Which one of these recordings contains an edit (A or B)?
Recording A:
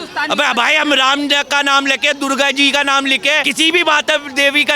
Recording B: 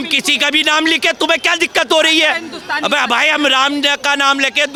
A